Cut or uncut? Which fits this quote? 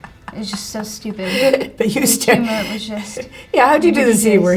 uncut